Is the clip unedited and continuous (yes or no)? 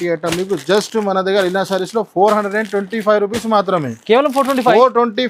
yes